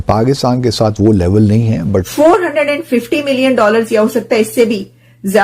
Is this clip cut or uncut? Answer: cut